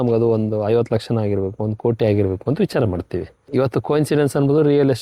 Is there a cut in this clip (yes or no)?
yes